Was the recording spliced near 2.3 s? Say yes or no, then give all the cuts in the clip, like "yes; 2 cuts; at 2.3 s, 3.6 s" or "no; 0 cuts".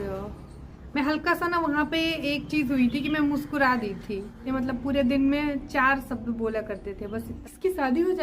no; 2 cuts; at 4.5 s, 7.4 s